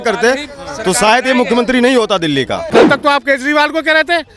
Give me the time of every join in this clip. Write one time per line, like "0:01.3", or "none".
0:02.6